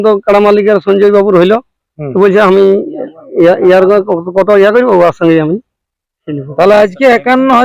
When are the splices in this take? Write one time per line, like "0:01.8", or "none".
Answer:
none